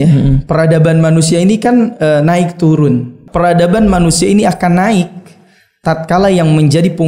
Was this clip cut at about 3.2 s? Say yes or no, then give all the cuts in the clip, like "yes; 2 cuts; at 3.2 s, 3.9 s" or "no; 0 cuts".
yes; 1 cut; at 3.2 s